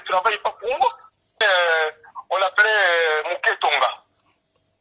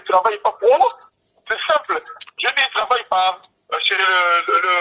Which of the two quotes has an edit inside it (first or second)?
first